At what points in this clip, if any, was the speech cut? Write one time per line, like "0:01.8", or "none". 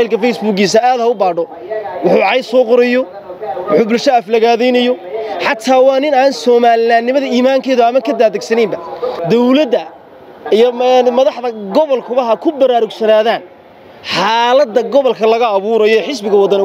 0:09.2